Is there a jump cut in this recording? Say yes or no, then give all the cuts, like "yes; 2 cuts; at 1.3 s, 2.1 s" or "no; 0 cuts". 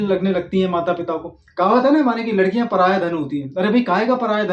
no; 0 cuts